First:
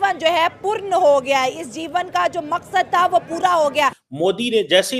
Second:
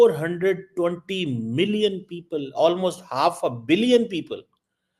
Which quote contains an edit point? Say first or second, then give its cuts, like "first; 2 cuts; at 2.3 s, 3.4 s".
first; 1 cut; at 4.0 s